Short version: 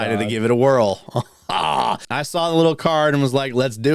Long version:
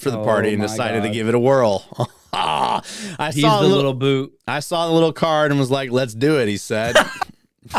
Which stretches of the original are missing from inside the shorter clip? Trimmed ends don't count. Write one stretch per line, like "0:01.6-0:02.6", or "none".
0:02.9-0:04.5